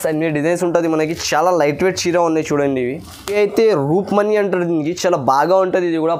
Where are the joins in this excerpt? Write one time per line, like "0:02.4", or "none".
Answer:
0:03.3